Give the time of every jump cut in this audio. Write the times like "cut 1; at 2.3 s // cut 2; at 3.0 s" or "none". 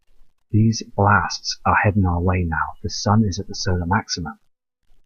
cut 1; at 2.1 s